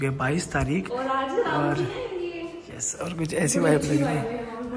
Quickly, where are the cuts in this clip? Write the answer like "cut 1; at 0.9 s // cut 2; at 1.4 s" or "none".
none